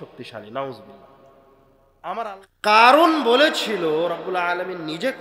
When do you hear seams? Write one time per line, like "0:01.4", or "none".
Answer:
0:02.3